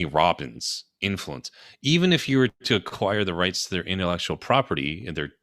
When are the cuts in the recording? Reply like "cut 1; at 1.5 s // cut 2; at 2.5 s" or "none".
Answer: none